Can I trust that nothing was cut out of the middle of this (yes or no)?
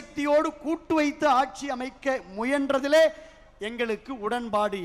yes